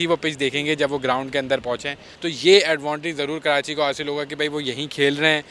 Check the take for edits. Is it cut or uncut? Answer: cut